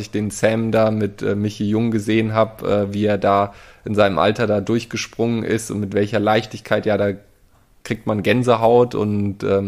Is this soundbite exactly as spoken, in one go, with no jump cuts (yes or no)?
yes